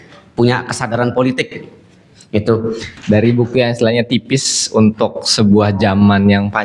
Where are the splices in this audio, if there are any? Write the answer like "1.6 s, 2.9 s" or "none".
2.9 s